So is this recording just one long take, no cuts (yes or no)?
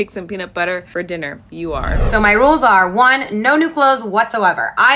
no